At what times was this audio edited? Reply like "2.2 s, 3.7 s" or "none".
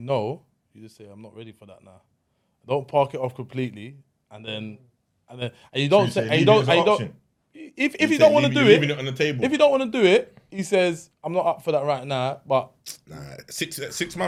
none